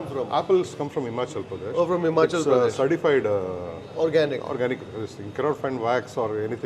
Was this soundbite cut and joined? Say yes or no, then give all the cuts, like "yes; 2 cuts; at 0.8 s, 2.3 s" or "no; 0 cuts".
no; 0 cuts